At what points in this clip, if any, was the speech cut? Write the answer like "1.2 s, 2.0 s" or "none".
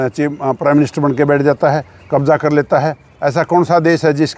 none